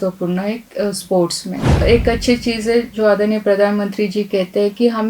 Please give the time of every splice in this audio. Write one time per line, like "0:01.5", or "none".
0:01.7